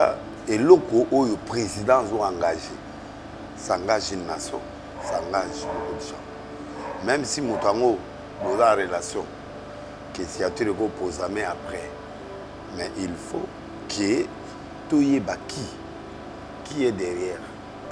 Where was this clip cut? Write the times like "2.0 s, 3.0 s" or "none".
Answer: none

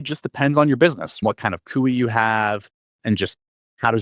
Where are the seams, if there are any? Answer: 1.2 s, 2.9 s

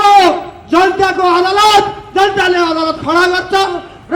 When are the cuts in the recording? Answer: none

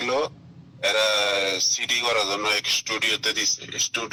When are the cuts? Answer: none

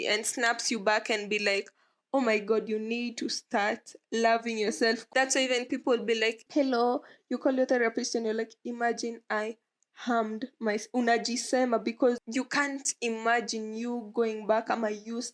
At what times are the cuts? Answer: 5.0 s, 6.4 s, 12.2 s

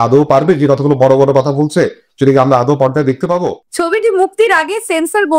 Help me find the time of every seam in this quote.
3.6 s

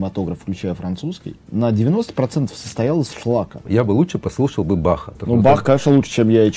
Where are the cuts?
1.3 s, 3.6 s, 5.1 s

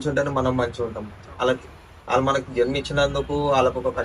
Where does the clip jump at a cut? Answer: none

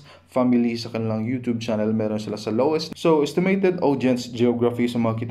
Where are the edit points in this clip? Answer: 2.9 s

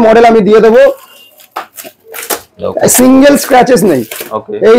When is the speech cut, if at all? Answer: none

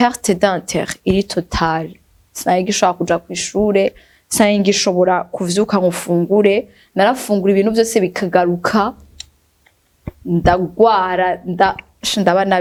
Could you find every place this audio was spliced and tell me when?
none

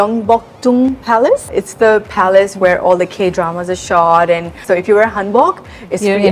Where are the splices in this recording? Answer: 1.5 s, 4.6 s

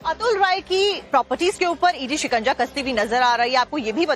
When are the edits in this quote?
none

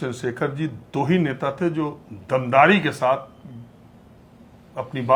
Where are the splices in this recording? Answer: none

